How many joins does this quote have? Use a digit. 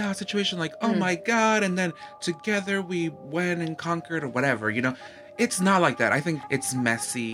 1